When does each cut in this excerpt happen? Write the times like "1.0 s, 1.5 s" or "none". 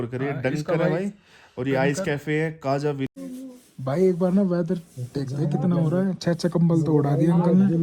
3.1 s